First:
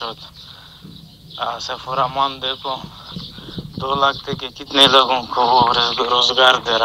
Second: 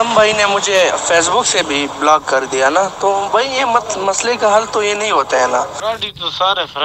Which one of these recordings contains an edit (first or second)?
second